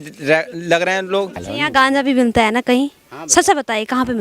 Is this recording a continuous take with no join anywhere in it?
no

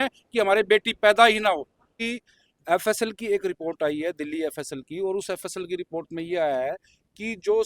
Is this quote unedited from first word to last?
no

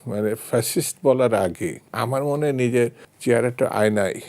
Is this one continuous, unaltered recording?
no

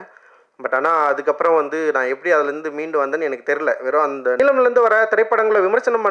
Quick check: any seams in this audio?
yes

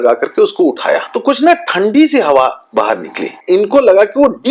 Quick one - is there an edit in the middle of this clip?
yes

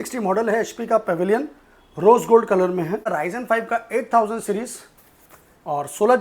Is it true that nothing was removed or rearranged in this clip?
no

